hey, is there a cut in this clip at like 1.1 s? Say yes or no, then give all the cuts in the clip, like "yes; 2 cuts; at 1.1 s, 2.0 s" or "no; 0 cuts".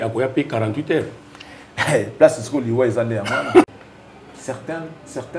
no; 1 cut; at 3.7 s